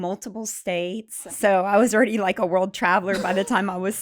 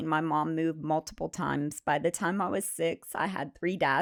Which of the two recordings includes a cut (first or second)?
first